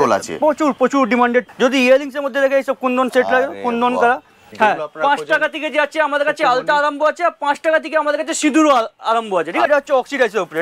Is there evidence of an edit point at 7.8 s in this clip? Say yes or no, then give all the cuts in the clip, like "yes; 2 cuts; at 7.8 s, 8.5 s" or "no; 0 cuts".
no; 3 cuts; at 1.5 s, 4.5 s, 9.7 s